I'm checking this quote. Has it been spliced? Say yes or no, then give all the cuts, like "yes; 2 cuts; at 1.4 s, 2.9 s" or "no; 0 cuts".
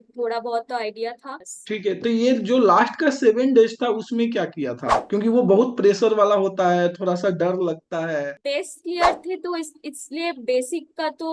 yes; 2 cuts; at 1.4 s, 8.4 s